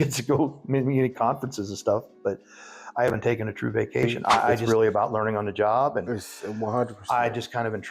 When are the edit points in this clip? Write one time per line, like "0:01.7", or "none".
0:04.6